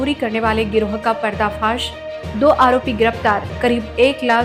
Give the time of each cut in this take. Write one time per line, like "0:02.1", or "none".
none